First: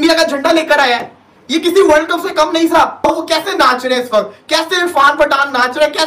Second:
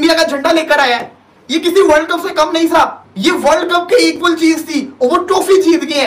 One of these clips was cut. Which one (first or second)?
first